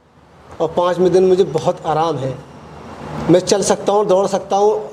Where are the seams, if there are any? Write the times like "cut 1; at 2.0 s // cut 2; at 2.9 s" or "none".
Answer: none

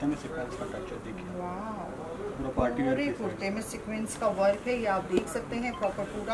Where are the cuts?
none

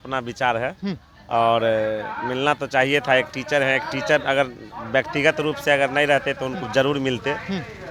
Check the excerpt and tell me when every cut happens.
none

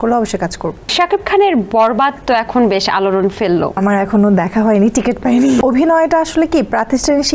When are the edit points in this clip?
cut 1; at 0.9 s // cut 2; at 3.8 s // cut 3; at 5.6 s

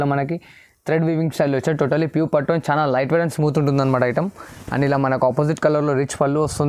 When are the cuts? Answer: none

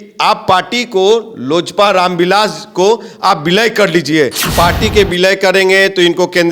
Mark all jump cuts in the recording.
cut 1; at 4.5 s

